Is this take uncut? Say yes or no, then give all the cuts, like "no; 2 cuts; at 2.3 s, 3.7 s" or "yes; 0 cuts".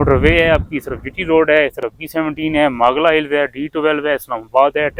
yes; 0 cuts